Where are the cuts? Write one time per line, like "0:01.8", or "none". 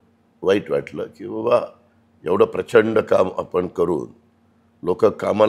none